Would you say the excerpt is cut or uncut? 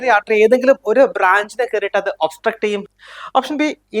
cut